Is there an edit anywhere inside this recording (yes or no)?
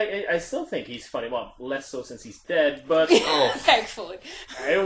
no